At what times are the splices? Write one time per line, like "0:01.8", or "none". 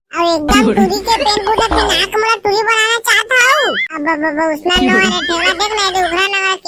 0:03.9